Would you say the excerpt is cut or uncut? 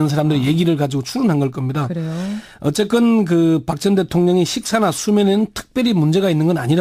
uncut